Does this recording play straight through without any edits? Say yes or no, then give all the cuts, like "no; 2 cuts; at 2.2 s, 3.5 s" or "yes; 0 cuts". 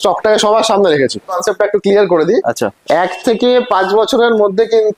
no; 1 cut; at 1.3 s